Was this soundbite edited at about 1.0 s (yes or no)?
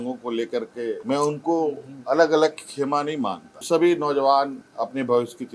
yes